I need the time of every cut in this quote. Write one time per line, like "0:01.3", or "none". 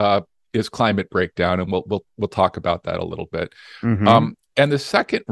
none